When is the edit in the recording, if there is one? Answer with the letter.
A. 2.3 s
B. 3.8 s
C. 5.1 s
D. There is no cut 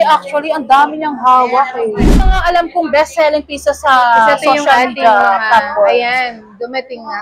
A